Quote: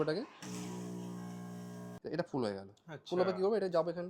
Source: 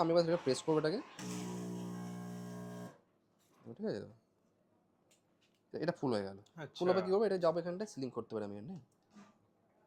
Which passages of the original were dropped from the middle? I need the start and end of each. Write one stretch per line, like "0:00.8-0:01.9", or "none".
0:02.7-0:05.7